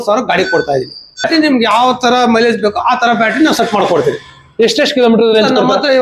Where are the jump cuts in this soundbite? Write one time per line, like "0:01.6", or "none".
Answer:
0:01.2